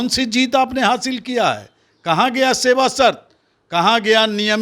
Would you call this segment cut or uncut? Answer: uncut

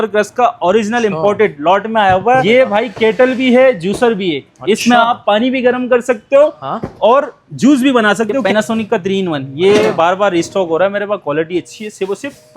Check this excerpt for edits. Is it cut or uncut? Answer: cut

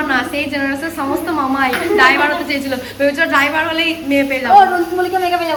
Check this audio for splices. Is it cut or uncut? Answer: uncut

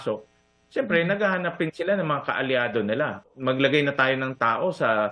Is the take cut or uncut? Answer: cut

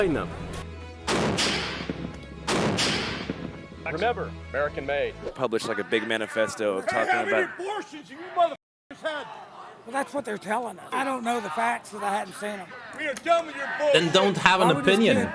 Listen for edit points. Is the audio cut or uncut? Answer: cut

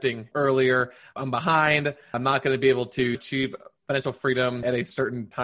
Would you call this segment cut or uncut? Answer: uncut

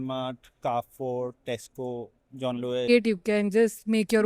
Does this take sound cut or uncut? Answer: cut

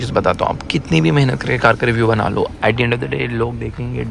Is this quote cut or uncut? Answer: uncut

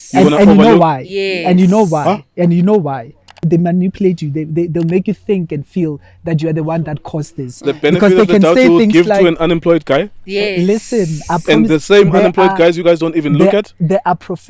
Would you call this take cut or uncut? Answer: cut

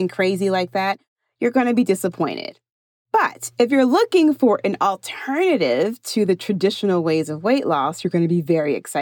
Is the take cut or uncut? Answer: uncut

